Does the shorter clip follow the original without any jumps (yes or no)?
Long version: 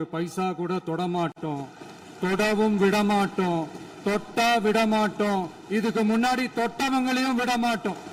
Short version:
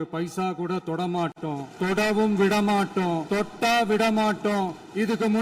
no